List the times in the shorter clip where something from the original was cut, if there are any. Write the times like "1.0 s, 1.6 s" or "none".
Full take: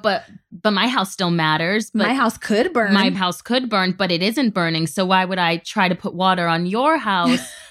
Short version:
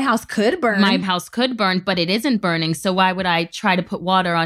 none